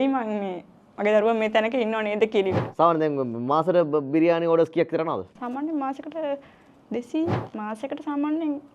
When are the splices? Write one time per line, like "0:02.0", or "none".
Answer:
0:02.6
0:07.5